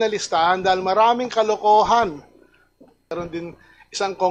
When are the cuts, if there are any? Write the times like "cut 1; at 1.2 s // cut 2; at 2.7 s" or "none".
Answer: cut 1; at 3.1 s